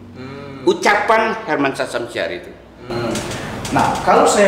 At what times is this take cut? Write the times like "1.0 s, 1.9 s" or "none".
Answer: 2.8 s